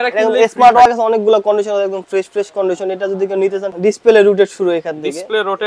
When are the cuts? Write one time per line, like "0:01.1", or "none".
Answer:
0:00.9
0:03.7